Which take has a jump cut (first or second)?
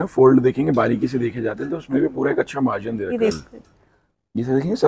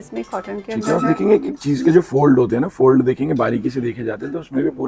first